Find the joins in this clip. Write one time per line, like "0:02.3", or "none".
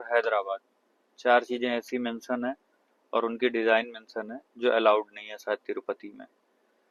none